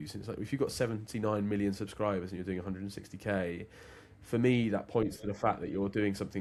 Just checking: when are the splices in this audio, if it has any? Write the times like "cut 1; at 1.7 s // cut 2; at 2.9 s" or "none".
none